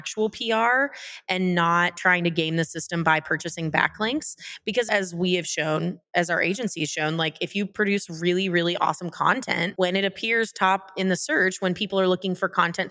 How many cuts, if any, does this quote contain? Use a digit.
0